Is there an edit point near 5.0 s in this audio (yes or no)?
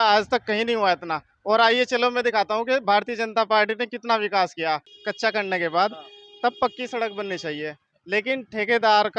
yes